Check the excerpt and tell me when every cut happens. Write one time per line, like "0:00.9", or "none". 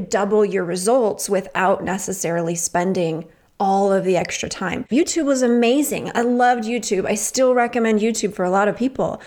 0:04.9